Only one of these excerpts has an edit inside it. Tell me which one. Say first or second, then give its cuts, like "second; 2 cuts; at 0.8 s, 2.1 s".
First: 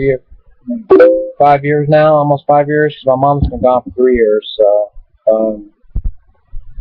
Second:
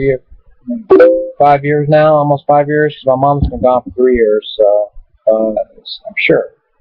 first; 1 cut; at 5.5 s